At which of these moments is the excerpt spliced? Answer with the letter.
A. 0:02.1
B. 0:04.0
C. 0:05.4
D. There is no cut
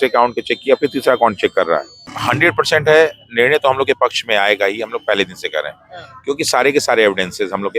A